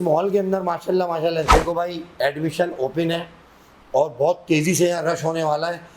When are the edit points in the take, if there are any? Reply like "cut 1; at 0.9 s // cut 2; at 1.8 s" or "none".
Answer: cut 1; at 1.5 s